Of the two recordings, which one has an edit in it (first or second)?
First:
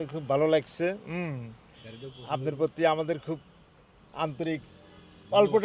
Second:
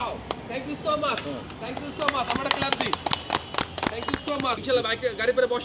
second